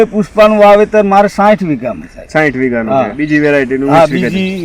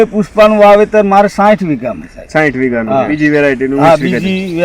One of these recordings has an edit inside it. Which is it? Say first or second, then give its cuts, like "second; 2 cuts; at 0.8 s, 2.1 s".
second; 1 cut; at 3.1 s